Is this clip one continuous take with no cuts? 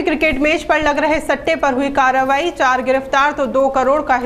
yes; 0 cuts

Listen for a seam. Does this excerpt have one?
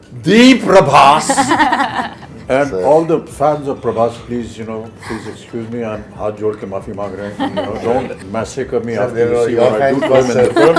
yes; 1 cut; at 8.2 s

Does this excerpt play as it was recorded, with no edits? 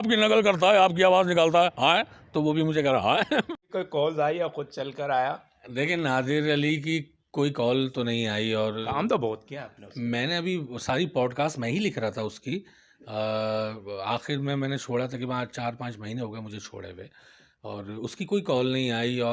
no; 1 cut; at 3.5 s

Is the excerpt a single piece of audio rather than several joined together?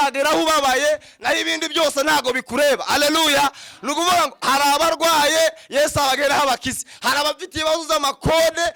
yes; 0 cuts

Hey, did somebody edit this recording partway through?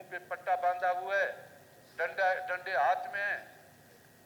no; 0 cuts

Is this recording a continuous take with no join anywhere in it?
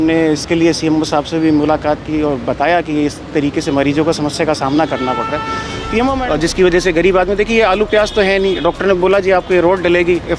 no; 1 cut; at 6.2 s

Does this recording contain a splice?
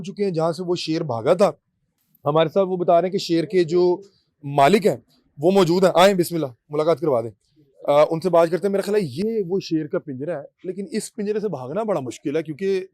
no; 0 cuts

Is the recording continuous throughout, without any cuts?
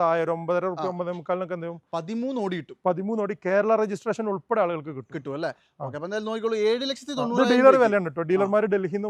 yes; 0 cuts

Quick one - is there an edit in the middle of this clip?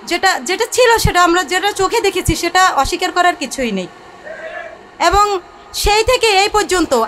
no; 0 cuts

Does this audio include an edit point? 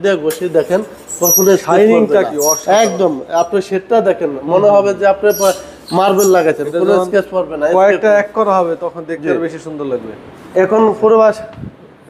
no; 0 cuts

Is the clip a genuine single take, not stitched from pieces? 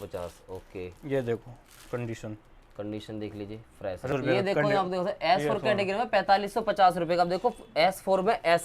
no; 1 cut; at 4.1 s

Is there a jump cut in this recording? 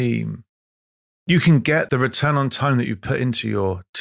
yes; 1 cut; at 1.9 s

